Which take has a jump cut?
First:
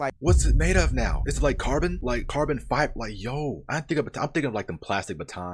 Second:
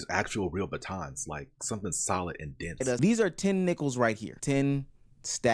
second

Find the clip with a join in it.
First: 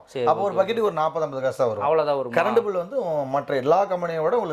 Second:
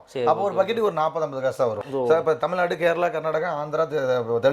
second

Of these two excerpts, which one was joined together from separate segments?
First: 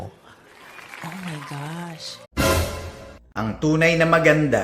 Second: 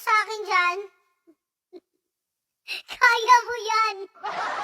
first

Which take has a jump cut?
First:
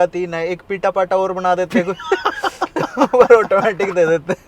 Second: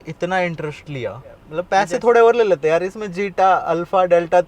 second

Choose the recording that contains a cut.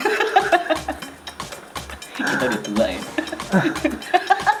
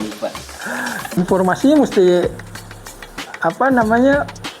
second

